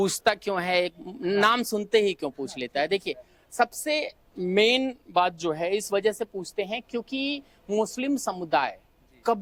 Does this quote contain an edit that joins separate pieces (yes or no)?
no